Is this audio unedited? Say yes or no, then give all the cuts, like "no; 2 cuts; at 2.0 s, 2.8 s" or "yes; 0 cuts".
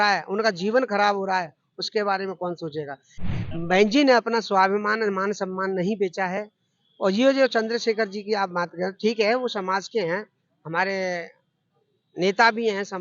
no; 1 cut; at 3.2 s